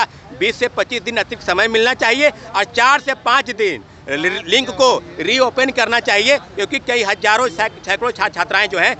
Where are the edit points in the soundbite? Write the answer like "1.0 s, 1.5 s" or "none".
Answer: none